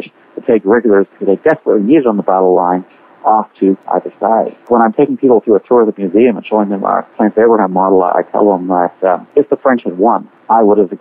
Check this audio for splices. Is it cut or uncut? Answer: uncut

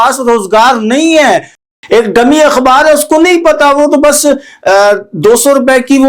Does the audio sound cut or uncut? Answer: cut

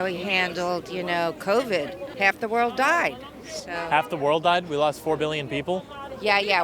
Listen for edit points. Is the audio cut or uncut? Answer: cut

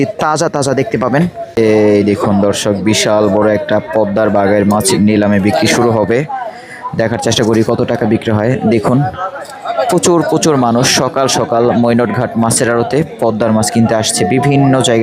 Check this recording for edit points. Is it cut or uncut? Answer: cut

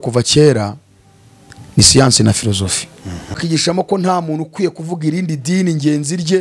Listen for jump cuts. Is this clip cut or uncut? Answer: cut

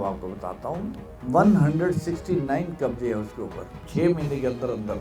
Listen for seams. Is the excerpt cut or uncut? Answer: cut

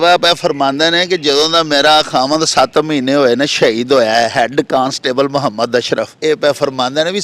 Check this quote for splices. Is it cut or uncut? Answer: cut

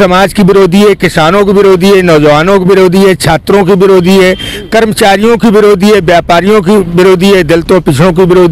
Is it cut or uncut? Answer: uncut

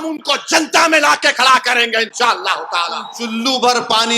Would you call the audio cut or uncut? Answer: cut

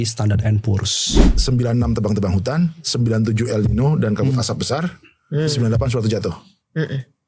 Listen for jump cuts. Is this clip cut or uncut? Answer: cut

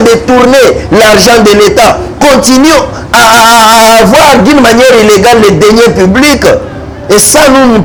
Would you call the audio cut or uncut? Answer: uncut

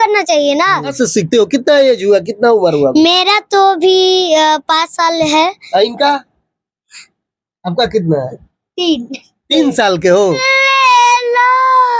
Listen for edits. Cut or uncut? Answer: cut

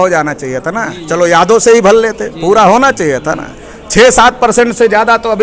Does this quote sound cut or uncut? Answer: uncut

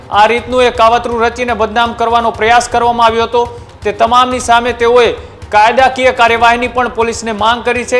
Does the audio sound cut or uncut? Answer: uncut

